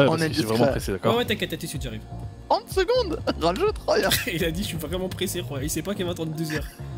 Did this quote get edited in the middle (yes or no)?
no